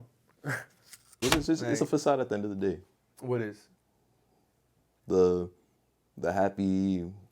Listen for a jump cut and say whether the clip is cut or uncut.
cut